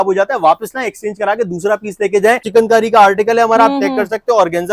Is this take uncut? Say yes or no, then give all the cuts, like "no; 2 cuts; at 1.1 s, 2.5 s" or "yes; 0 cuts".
no; 1 cut; at 2.4 s